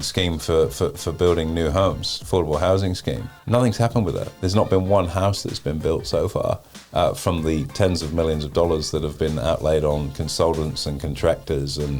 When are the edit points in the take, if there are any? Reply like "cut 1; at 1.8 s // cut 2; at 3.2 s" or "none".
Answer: cut 1; at 3.3 s // cut 2; at 4.3 s